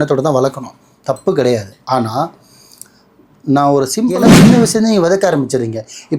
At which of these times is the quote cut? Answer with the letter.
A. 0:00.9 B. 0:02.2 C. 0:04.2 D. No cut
C